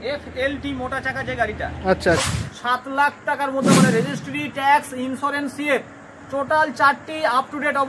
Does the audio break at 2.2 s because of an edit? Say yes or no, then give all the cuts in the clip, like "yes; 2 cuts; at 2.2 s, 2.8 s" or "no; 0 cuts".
yes; 1 cut; at 2.2 s